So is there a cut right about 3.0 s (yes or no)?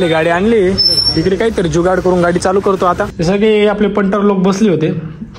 yes